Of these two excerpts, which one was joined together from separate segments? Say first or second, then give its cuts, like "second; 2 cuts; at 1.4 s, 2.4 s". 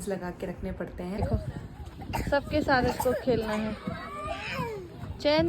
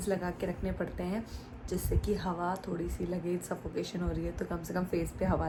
first; 1 cut; at 1.2 s